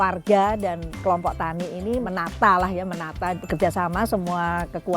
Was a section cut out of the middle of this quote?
yes; 2 cuts; at 2.0 s, 3.4 s

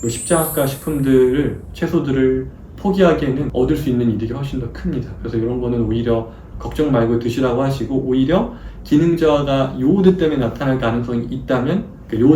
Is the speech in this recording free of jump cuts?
yes; 0 cuts

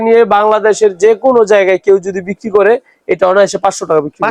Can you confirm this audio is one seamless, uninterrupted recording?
yes; 0 cuts

